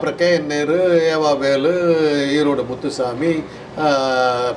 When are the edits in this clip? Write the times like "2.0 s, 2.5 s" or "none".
none

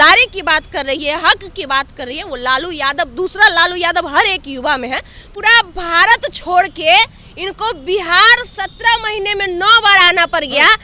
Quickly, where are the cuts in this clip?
5.2 s

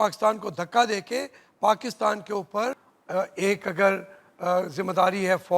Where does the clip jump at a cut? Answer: 2.9 s

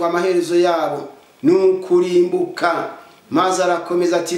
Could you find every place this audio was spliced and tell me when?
none

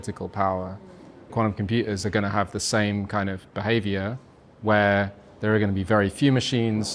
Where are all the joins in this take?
1.3 s

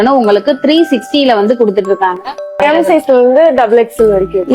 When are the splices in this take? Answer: 2.6 s

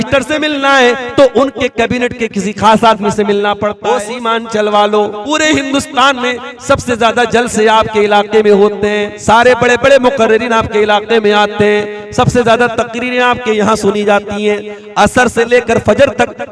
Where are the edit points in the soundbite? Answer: 3.8 s, 5.2 s, 9.1 s

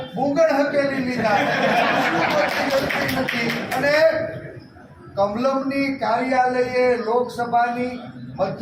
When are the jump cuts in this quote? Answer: none

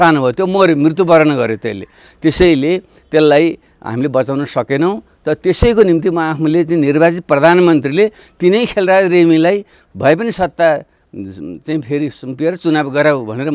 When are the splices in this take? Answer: none

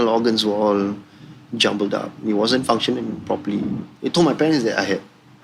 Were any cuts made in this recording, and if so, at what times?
3.8 s

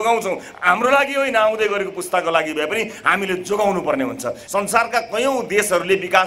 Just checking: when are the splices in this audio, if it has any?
4.4 s

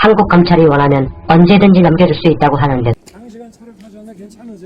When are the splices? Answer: 3.0 s

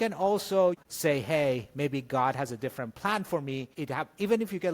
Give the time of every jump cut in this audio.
0.8 s, 3.7 s

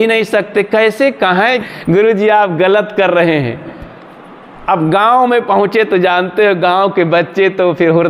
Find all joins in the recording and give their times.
1.6 s

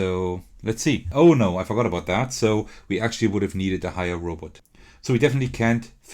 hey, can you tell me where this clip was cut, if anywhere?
1.1 s

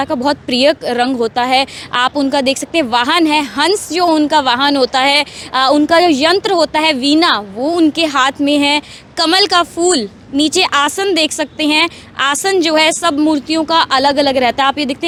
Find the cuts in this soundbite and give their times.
none

